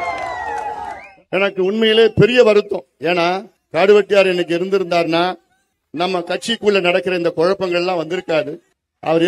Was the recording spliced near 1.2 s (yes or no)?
yes